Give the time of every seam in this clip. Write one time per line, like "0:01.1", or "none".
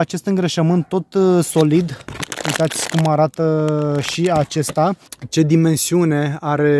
0:05.1